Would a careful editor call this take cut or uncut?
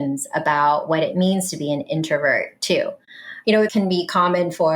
cut